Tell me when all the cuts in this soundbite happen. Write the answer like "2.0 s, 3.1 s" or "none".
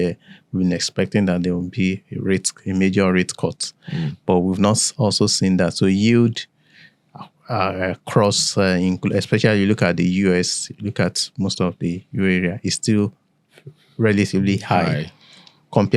none